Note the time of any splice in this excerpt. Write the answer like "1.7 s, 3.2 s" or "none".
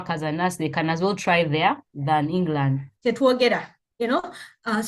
2.9 s